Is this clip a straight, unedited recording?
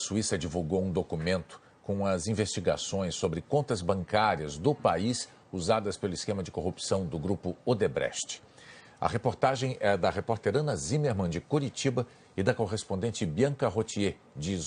yes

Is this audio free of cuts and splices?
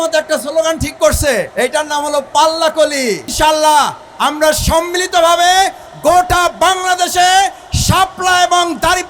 no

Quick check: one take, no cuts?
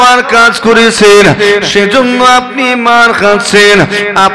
yes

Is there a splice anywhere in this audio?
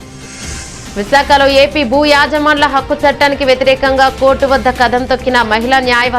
no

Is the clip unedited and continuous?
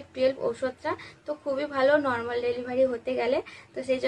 yes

